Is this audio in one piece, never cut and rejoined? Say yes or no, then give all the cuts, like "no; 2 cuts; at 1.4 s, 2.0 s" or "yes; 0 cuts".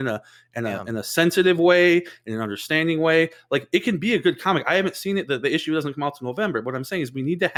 yes; 0 cuts